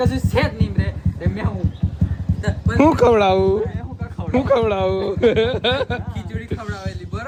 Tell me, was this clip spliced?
no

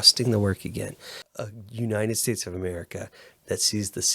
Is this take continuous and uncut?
no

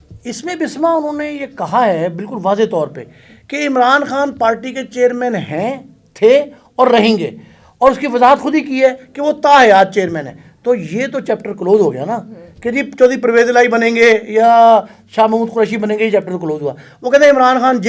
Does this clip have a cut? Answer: no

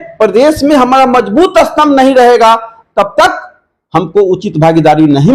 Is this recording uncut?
yes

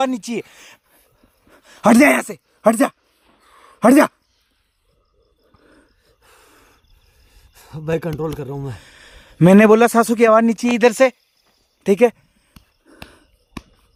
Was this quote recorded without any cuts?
yes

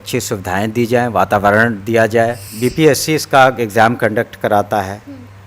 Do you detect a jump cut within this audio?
yes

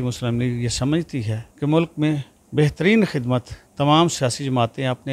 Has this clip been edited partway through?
yes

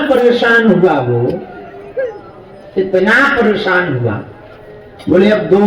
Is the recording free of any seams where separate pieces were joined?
yes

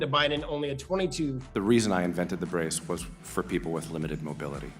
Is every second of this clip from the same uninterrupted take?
no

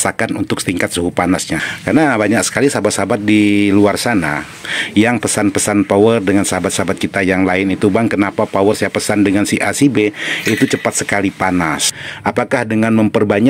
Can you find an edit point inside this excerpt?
yes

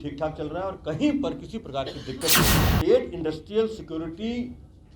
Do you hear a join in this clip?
yes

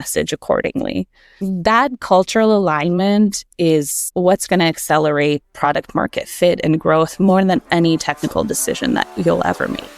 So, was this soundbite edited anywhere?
yes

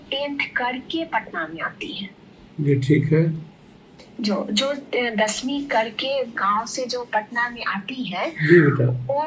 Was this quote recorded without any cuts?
yes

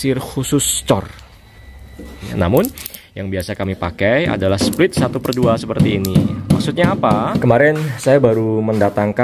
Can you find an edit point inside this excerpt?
yes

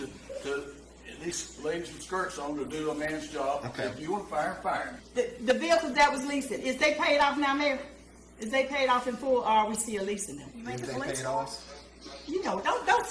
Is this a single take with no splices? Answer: no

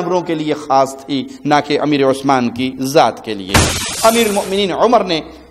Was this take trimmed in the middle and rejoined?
yes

